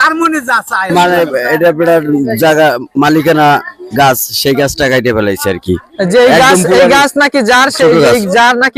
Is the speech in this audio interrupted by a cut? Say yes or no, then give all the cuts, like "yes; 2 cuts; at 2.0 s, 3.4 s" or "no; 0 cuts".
yes; 1 cut; at 1.0 s